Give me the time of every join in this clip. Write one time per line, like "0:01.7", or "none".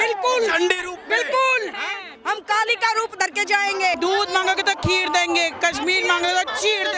0:03.9